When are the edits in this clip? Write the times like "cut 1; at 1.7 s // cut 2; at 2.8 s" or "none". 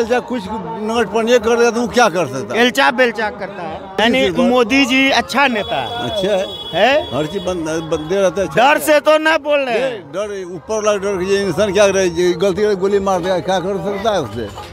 cut 1; at 3.9 s